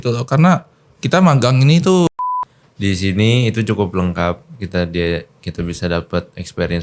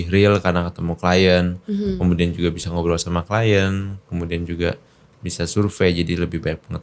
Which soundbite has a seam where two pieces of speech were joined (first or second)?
first